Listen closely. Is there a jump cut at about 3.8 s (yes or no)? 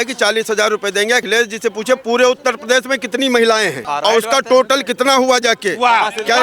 yes